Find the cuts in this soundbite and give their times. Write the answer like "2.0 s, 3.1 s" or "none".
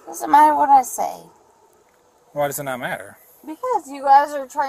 none

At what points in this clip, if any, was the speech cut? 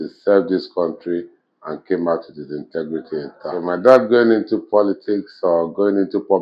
3.5 s

